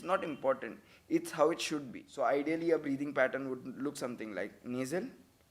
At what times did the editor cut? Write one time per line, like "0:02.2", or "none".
0:02.0